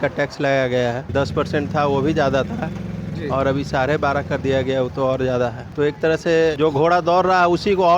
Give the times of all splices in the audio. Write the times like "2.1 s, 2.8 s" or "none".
1.0 s, 5.6 s, 6.6 s